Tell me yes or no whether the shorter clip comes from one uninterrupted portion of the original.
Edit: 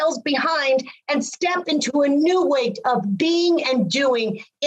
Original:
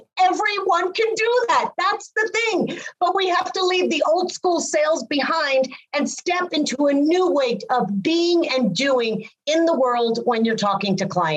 yes